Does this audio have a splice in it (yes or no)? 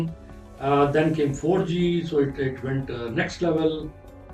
no